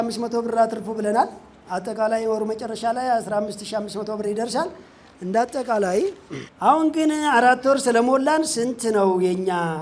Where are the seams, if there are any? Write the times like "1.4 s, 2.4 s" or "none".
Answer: none

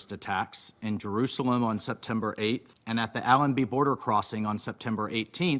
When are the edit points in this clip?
2.7 s

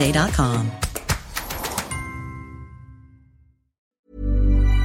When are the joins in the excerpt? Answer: 3.9 s

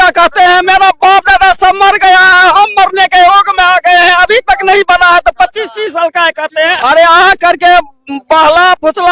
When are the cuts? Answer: 6.8 s

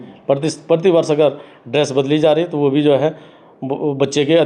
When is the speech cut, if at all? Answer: none

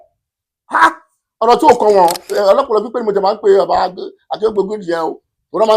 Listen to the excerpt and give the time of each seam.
2.3 s

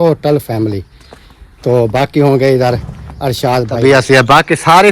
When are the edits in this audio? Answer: 3.7 s

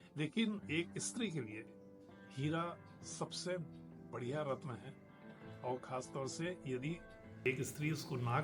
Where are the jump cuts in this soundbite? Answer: 7.3 s

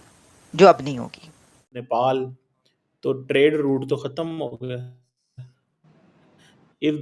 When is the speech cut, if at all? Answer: 1.8 s

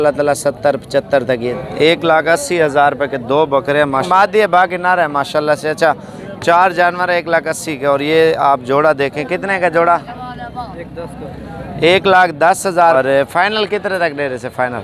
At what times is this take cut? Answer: 1.5 s, 4.0 s, 12.9 s

